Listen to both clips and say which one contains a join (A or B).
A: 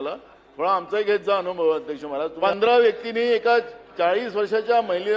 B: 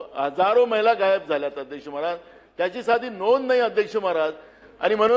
A